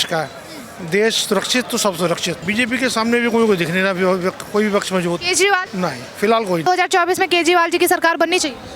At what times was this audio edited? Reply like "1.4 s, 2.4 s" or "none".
2.4 s, 5.7 s, 6.6 s